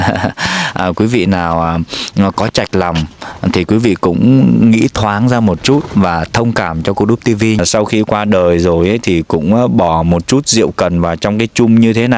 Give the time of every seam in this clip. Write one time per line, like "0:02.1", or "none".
0:07.6